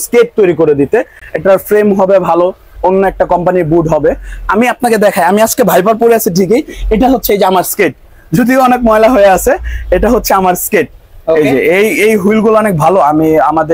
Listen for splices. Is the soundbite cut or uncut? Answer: uncut